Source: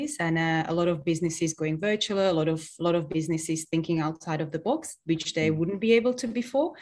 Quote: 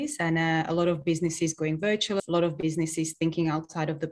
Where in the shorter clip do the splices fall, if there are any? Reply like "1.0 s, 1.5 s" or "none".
2.2 s